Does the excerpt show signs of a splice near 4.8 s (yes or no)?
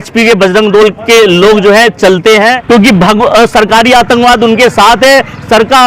no